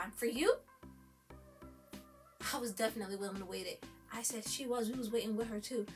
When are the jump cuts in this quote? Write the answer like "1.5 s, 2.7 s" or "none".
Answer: none